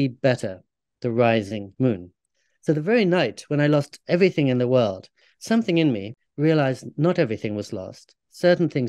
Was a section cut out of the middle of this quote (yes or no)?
yes